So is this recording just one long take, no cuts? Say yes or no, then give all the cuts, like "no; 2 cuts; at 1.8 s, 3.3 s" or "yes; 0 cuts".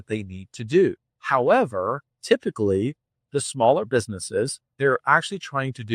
no; 3 cuts; at 1.1 s, 2.1 s, 4.8 s